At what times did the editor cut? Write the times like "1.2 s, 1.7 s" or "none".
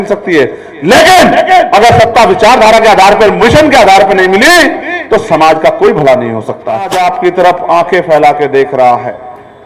6.9 s